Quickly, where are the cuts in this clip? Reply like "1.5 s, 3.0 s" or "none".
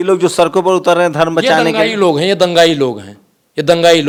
none